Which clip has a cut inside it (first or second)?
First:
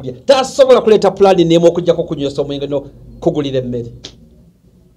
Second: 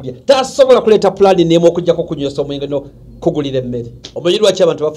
second